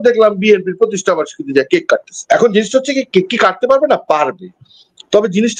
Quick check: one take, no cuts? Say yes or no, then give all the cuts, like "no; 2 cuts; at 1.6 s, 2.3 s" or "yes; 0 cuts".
yes; 0 cuts